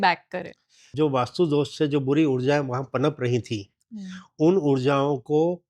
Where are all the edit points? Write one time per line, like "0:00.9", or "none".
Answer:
0:00.9